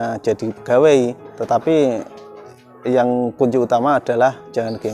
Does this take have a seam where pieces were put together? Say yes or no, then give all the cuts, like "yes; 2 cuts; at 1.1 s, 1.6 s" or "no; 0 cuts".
yes; 1 cut; at 1.4 s